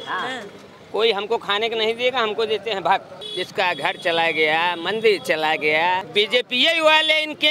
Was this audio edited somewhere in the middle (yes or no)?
yes